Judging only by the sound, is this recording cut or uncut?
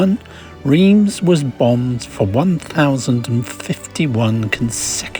uncut